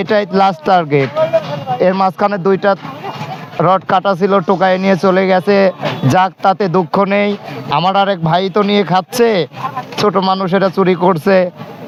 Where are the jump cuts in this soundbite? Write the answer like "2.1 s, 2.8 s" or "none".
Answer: none